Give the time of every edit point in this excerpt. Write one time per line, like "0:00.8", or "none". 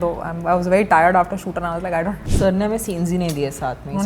0:02.2